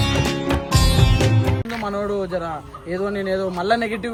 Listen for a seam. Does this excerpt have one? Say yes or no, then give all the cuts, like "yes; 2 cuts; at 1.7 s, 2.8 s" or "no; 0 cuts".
no; 0 cuts